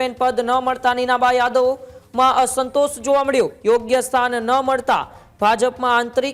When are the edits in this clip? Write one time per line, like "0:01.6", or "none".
0:03.5

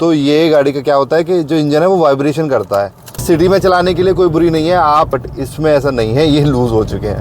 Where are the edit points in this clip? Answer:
0:03.2
0:05.1

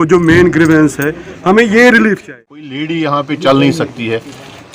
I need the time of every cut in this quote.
0:02.2

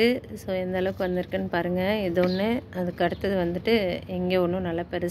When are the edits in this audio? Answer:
none

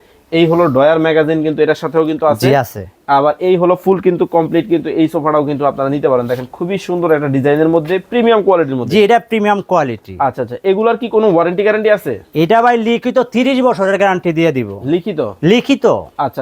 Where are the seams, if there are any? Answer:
none

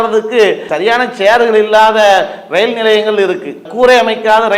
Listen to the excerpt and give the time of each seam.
0:03.7

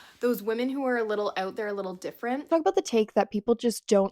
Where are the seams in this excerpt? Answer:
0:02.4

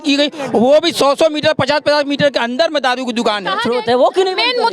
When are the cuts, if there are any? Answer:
0:03.6

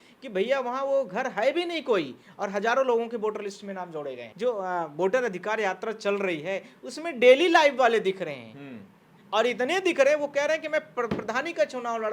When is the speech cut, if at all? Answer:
0:04.2

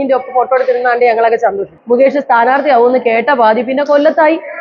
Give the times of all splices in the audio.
0:01.7

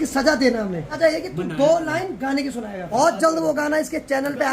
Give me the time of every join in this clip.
0:01.0
0:02.9

